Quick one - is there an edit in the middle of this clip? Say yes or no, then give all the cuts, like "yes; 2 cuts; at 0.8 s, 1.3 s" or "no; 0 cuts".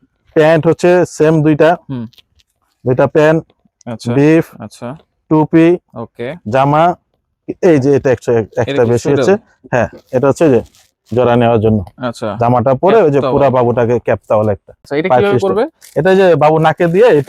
yes; 1 cut; at 14.8 s